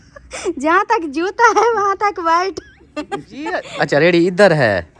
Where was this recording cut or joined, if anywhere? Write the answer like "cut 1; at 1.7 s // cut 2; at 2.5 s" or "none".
cut 1; at 3.7 s